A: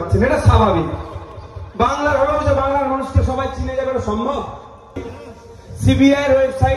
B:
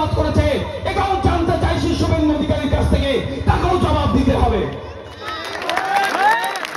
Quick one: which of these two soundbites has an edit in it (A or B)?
A